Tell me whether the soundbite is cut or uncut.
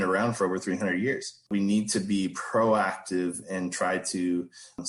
cut